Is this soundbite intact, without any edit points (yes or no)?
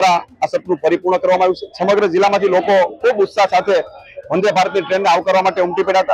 no